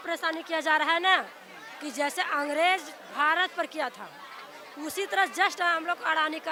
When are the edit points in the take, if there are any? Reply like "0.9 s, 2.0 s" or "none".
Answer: none